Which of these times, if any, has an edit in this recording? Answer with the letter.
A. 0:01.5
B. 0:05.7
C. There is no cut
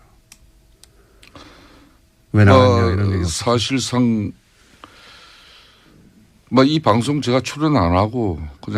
B